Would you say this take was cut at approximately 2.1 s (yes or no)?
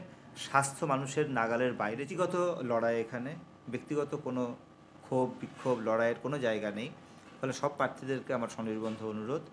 yes